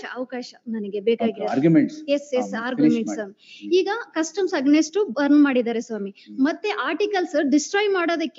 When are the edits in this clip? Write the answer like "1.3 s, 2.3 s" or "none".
none